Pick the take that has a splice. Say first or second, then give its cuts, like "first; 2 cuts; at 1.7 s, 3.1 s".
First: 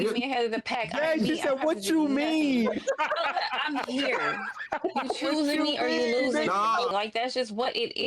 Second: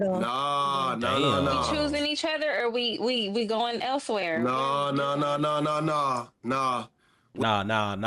first; 1 cut; at 6.9 s